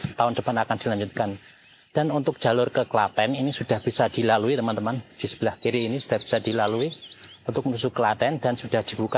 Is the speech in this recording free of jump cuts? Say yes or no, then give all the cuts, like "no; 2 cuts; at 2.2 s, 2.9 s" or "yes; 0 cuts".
yes; 0 cuts